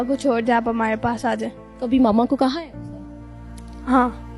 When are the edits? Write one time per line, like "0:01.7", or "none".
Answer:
0:01.6